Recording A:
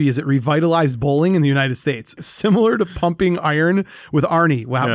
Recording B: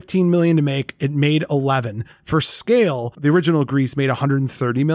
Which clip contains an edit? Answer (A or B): A